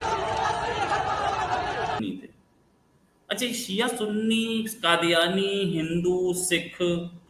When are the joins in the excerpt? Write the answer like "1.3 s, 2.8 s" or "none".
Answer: 2.0 s